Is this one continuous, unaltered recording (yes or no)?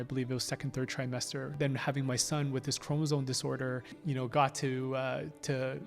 no